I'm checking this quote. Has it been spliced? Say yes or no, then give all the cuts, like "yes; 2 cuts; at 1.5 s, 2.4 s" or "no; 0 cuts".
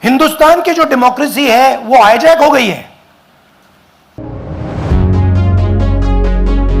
no; 0 cuts